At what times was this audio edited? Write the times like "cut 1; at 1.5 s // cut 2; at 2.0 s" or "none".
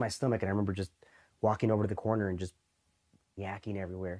cut 1; at 3.3 s